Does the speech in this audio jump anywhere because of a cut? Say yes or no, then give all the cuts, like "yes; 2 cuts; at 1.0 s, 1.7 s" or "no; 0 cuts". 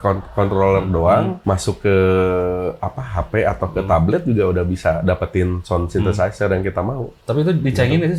yes; 1 cut; at 1.4 s